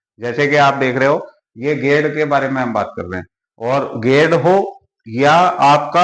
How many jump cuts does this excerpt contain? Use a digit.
0